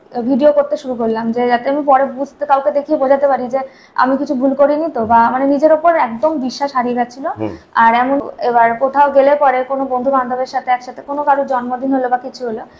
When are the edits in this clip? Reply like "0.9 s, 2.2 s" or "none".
8.2 s